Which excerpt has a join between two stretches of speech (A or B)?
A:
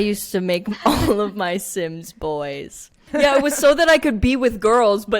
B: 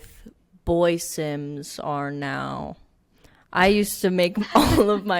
A